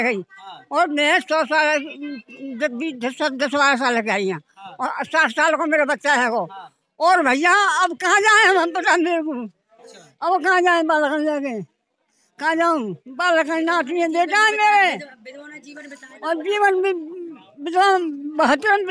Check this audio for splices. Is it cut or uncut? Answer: uncut